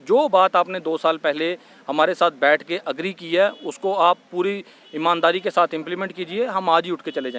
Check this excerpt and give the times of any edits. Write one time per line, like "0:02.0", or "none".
none